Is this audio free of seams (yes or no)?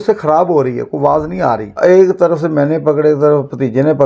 no